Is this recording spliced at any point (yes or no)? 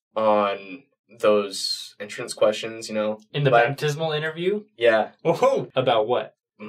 yes